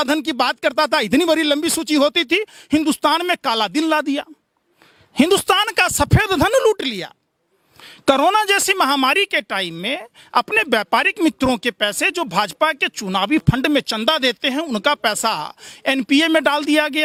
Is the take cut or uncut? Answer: uncut